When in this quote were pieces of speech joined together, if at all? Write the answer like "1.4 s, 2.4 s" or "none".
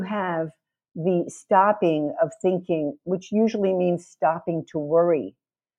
none